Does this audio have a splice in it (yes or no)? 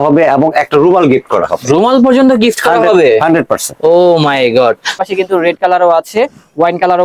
yes